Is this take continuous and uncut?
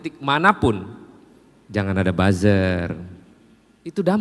yes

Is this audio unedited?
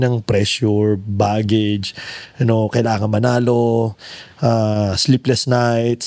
yes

